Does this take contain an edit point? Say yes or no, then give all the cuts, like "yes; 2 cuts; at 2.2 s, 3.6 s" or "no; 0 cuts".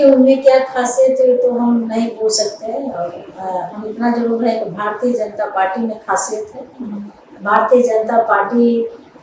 no; 0 cuts